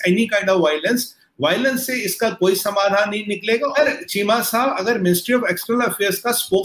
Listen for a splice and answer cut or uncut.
cut